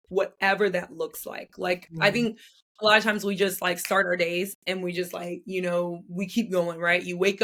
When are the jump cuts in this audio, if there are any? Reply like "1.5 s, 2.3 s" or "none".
none